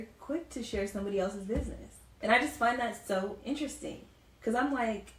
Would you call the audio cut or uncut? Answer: cut